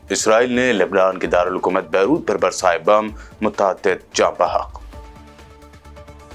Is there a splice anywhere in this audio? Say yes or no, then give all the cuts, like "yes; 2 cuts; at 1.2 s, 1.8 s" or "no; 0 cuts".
no; 0 cuts